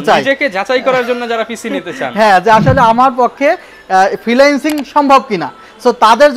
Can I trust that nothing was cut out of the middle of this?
yes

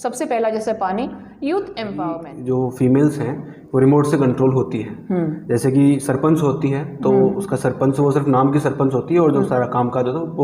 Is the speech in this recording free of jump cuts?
no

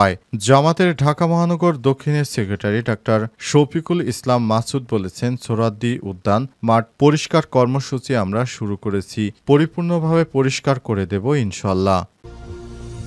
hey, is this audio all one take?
no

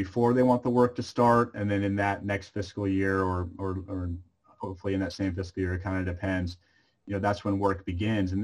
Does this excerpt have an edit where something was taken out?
no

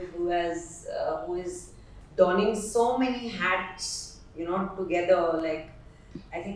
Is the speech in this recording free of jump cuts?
yes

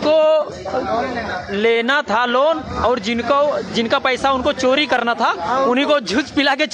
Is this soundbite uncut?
yes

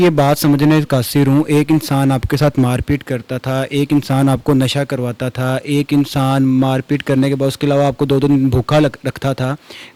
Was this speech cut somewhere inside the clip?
no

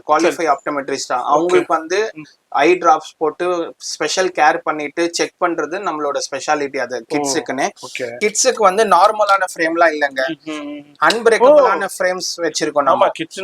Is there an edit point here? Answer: yes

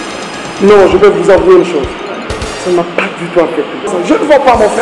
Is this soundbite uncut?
no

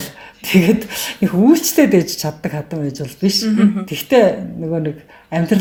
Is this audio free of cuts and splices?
yes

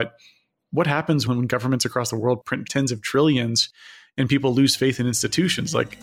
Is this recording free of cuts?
no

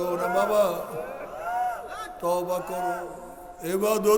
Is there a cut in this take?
no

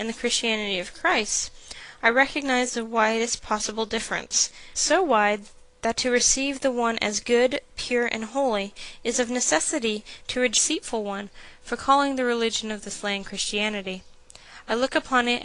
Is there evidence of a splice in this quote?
no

